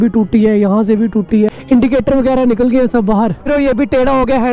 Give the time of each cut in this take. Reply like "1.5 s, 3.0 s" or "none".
1.6 s, 3.4 s